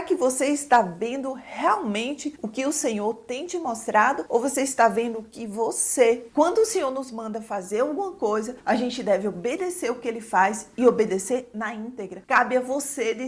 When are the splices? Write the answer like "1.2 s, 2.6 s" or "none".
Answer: 6.3 s, 12.1 s